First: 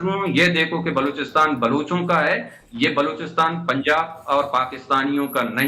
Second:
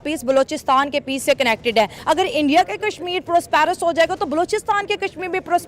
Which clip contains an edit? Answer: second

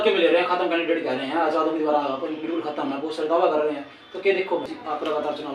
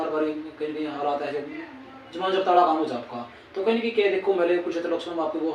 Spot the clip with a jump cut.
first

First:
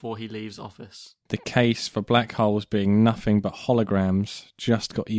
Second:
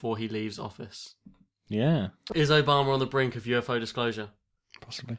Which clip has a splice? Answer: first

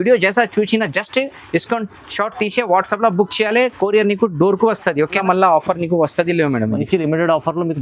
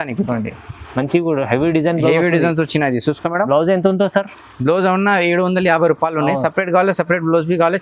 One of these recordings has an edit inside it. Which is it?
first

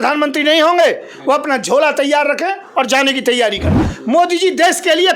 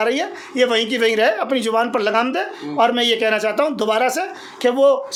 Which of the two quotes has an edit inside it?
first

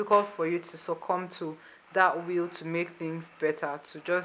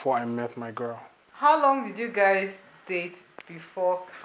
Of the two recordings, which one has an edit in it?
second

